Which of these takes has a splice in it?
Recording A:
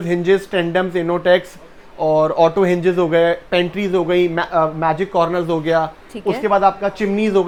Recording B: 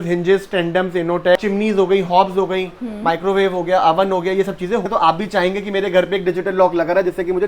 B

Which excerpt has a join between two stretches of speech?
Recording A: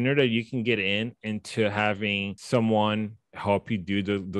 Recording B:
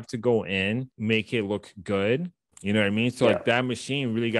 B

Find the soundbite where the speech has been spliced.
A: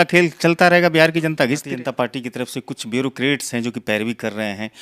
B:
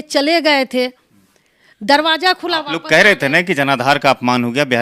A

